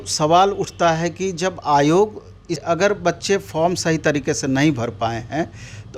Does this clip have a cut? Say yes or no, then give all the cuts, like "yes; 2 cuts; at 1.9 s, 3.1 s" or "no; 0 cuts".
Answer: yes; 1 cut; at 2.6 s